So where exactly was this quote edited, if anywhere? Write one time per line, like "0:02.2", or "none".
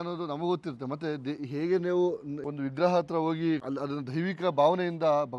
0:02.3
0:03.7